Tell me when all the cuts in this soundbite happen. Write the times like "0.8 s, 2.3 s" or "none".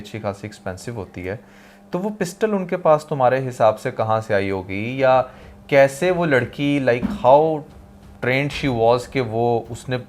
none